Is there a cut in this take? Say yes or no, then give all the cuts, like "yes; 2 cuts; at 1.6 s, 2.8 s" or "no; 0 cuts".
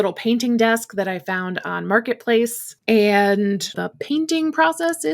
yes; 2 cuts; at 2.7 s, 3.8 s